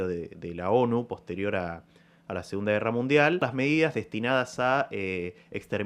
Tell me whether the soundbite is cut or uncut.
cut